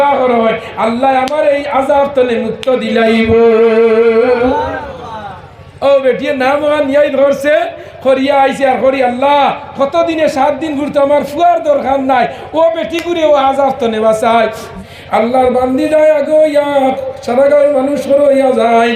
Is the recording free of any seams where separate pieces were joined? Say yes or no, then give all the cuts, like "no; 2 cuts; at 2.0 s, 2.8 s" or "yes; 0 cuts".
no; 1 cut; at 14.7 s